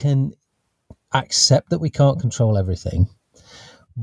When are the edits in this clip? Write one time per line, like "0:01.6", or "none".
none